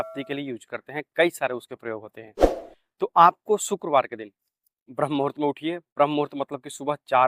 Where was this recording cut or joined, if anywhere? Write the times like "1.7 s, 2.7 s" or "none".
none